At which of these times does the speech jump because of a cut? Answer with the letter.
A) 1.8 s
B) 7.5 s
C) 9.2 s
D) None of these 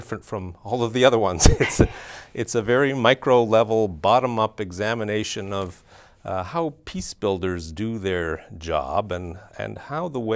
A